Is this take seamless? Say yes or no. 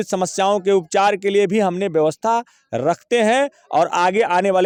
yes